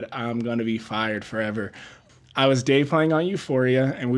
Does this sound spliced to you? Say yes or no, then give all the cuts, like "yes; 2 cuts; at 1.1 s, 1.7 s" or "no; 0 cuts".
yes; 1 cut; at 1.8 s